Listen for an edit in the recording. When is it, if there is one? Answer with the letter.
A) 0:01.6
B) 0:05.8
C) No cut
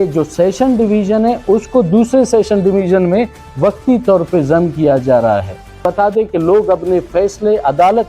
B